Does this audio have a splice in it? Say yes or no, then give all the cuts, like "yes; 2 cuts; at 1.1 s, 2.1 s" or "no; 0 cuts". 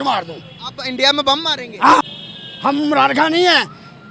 yes; 1 cut; at 2.2 s